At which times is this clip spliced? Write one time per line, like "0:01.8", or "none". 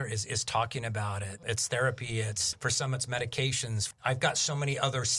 0:01.4
0:04.0